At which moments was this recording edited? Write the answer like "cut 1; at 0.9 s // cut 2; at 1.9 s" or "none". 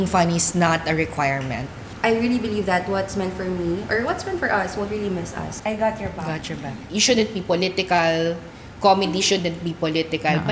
cut 1; at 1.8 s // cut 2; at 5.5 s // cut 3; at 6.8 s